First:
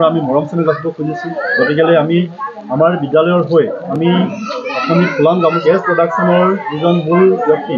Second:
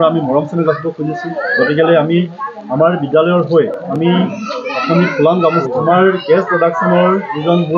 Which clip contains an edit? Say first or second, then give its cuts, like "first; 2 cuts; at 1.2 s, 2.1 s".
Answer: first; 1 cut; at 5.6 s